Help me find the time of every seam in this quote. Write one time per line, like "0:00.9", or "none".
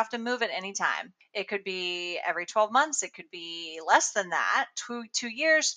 none